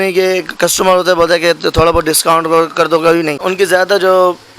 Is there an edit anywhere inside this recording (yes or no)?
yes